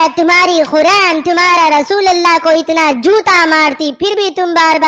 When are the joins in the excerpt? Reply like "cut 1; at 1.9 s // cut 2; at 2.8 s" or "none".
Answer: none